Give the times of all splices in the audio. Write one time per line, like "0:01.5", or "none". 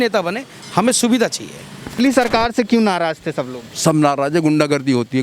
0:02.0